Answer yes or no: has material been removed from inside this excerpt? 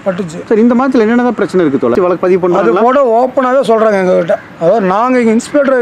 yes